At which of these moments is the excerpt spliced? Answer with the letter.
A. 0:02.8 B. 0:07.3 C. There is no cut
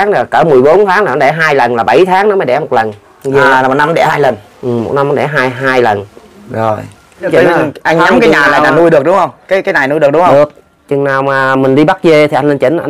B